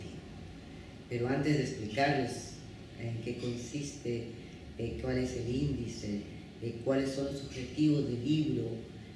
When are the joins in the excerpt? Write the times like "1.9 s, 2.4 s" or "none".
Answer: none